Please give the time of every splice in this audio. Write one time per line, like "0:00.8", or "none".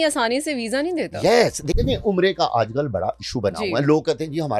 0:01.8